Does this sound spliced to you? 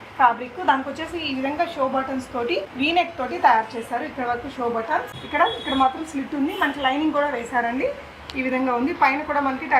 yes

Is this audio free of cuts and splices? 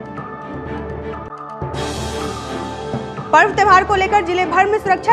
no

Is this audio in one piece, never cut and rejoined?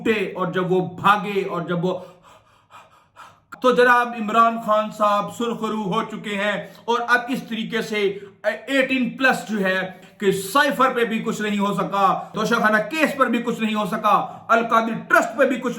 no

